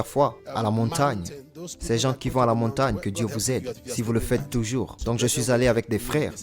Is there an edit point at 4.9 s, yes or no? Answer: yes